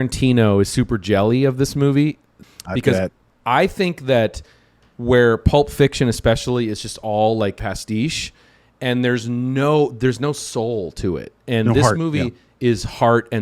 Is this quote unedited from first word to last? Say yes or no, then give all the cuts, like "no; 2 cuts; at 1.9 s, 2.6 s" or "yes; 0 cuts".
no; 2 cuts; at 2.3 s, 7.6 s